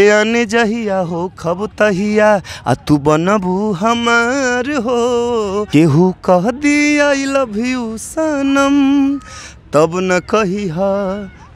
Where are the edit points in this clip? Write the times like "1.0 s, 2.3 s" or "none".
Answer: 5.6 s